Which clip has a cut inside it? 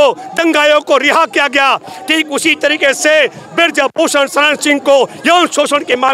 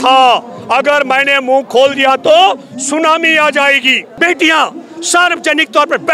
second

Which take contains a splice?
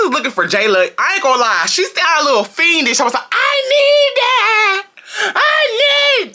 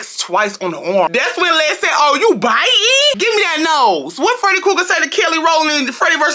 second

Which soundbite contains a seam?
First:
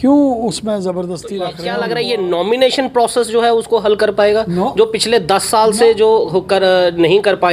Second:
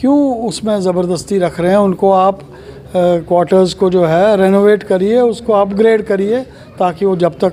first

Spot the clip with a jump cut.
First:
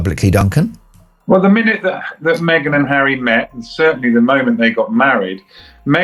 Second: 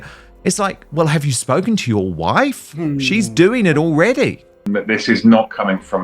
second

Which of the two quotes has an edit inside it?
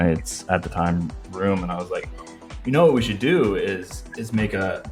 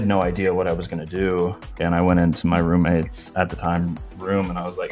second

